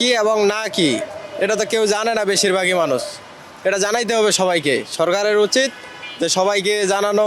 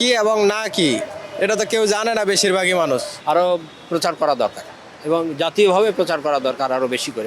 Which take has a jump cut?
second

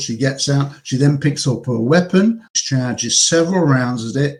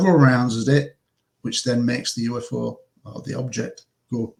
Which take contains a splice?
first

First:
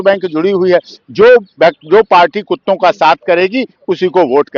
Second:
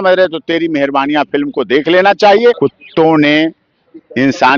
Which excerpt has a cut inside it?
second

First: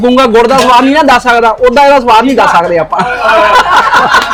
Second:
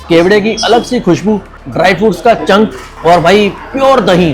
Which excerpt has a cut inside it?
second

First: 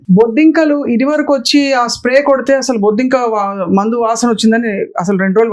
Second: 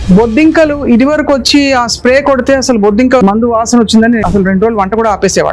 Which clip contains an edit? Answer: second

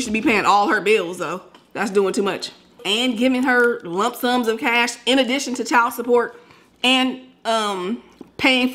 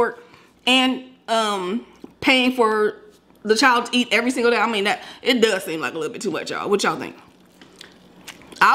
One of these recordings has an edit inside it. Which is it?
first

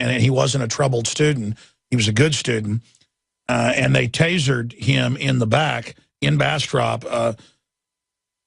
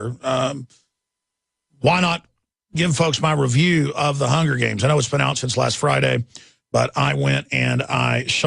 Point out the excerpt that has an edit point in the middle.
second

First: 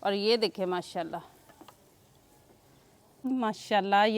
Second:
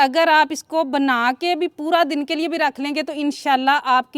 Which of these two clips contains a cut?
first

